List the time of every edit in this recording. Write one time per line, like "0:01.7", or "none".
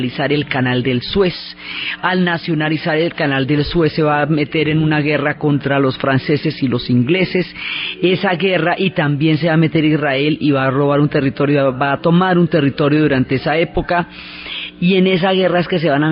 0:11.4